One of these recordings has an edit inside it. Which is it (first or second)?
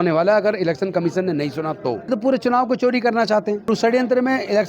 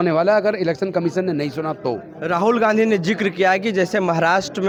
first